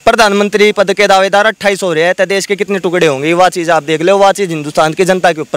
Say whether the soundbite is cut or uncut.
uncut